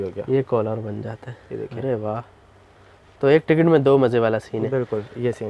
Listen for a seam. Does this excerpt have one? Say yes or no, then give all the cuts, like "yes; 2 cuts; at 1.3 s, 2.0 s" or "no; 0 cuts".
no; 0 cuts